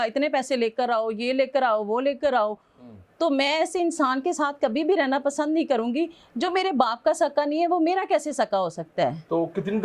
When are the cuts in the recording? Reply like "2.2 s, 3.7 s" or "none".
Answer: none